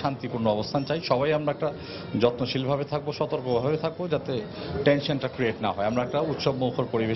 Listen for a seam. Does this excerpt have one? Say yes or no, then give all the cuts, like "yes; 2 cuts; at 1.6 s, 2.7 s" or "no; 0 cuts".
no; 0 cuts